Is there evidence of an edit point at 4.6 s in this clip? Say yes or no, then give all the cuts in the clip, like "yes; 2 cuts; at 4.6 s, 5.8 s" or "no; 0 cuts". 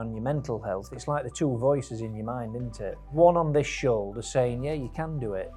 no; 2 cuts; at 0.9 s, 3.1 s